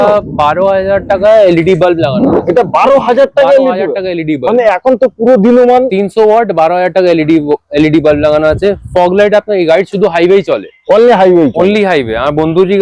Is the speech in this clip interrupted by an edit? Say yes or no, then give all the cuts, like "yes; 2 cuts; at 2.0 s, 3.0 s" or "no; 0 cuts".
no; 0 cuts